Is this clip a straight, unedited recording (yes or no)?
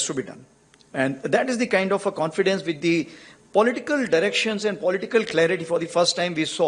yes